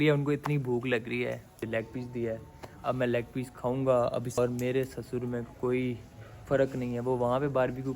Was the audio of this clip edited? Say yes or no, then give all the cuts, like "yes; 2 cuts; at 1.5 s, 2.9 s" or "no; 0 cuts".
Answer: yes; 2 cuts; at 1.6 s, 4.4 s